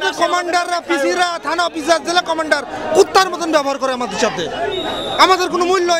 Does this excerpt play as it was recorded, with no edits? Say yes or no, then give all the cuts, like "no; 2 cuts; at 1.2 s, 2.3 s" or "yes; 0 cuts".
yes; 0 cuts